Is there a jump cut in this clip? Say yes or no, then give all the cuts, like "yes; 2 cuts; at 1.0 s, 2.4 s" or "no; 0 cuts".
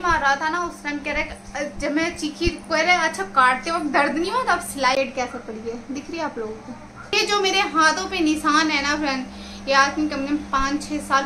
yes; 2 cuts; at 5.0 s, 7.1 s